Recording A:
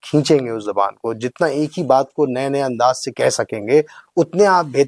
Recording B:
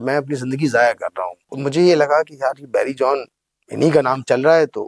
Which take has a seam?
B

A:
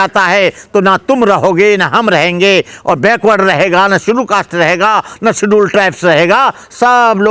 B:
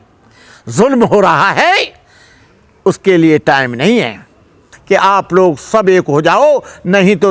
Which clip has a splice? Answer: B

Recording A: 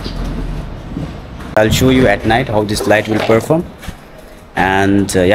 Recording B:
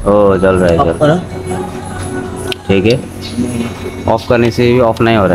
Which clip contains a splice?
A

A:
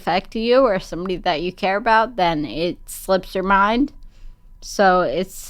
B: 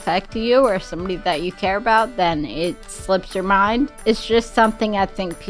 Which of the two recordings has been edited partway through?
B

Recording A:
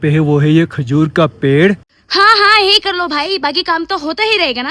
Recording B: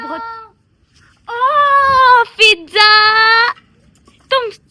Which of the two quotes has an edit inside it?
A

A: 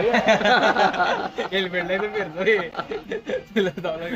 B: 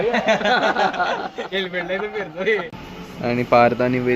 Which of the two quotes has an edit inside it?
B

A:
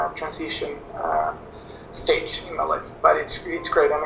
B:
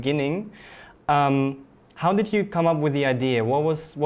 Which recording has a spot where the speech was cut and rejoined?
A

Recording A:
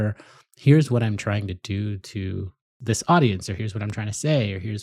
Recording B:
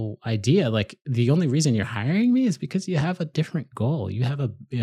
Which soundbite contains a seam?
A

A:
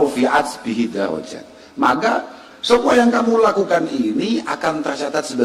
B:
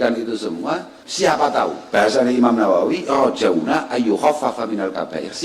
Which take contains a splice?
B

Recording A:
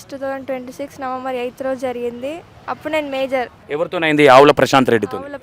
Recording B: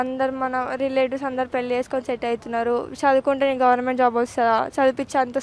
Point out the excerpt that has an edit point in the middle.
A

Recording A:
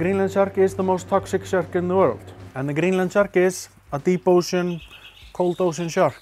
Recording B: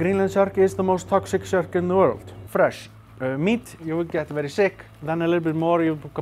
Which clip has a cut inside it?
B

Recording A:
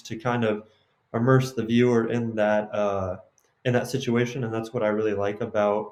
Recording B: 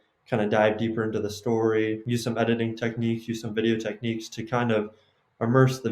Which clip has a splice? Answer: B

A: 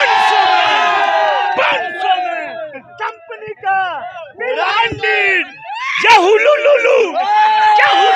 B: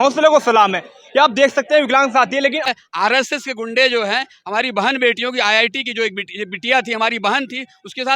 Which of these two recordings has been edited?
B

